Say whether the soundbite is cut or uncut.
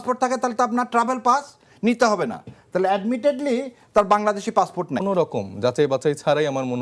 cut